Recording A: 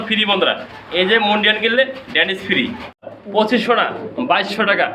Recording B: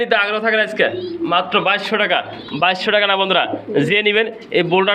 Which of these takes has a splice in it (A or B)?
A